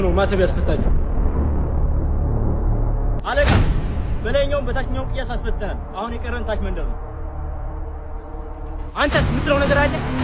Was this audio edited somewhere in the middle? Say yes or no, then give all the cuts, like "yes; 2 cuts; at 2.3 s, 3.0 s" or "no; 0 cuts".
no; 0 cuts